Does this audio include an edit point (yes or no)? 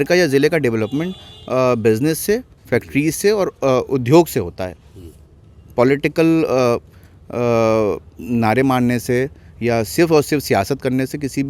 no